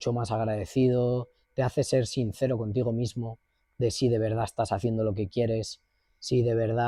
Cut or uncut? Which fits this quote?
uncut